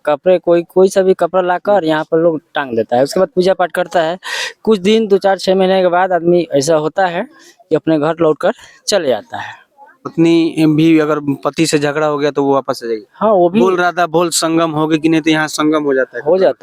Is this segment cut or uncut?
uncut